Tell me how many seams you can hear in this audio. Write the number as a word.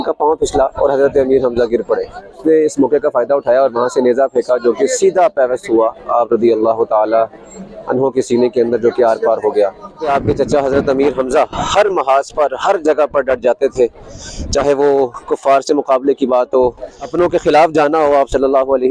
three